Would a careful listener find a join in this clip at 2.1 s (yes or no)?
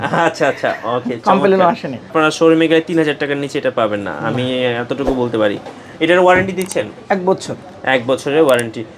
yes